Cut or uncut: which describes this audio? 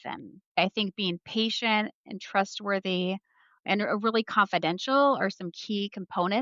uncut